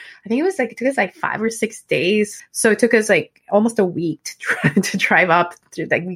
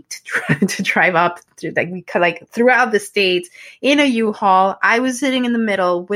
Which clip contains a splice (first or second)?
first